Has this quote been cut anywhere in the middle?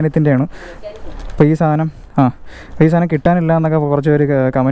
no; 0 cuts

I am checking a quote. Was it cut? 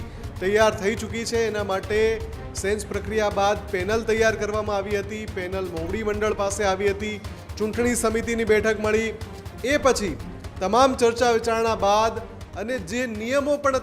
no; 0 cuts

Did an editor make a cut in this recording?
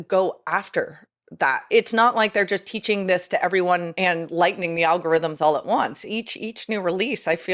yes; 2 cuts; at 1.7 s, 3.9 s

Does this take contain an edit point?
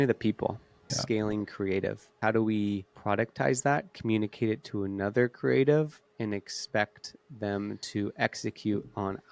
yes; 3 cuts; at 0.9 s, 2.2 s, 2.9 s

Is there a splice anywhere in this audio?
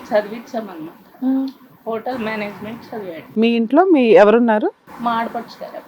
yes; 2 cuts; at 3.2 s, 4.9 s

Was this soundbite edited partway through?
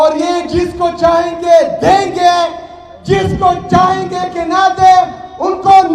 no; 0 cuts

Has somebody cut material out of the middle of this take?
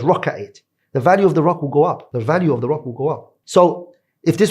yes; 2 cuts; at 2.1 s, 3.3 s

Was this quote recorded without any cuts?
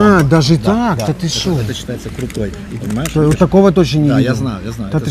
no; 1 cut; at 2.8 s

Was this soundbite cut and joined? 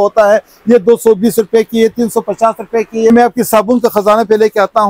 yes; 1 cut; at 3.1 s

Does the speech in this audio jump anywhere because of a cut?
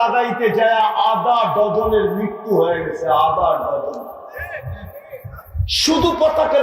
yes; 1 cut; at 5.7 s

